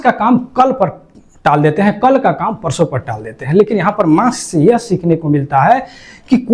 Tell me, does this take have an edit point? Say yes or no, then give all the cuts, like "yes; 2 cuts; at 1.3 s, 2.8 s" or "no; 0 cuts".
no; 0 cuts